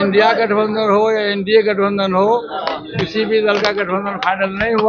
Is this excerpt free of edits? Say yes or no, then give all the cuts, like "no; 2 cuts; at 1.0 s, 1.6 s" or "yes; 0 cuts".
yes; 0 cuts